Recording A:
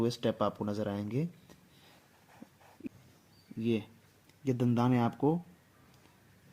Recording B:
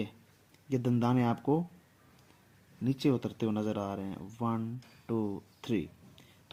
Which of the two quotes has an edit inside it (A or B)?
A